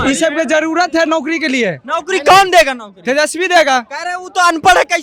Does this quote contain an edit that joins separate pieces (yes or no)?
no